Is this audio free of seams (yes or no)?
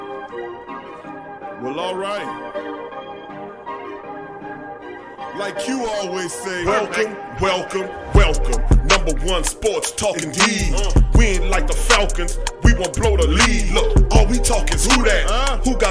yes